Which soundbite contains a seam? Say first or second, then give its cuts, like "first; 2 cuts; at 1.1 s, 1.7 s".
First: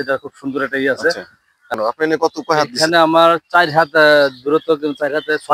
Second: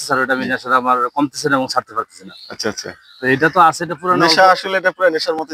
first; 1 cut; at 1.7 s